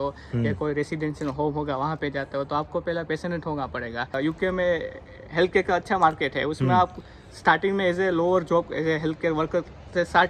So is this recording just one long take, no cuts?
no; 1 cut; at 4.1 s

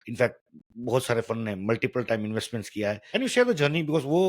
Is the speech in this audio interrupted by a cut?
yes; 1 cut; at 3.1 s

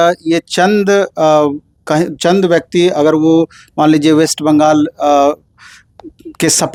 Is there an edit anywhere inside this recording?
no; 0 cuts

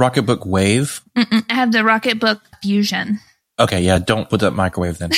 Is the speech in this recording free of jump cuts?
no; 2 cuts; at 2.5 s, 4.3 s

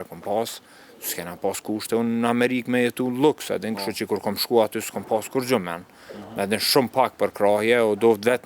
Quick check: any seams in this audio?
no; 0 cuts

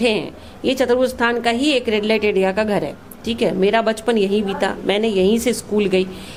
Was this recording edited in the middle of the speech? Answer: no; 0 cuts

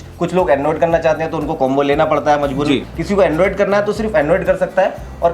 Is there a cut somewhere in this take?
yes; 1 cut; at 2.9 s

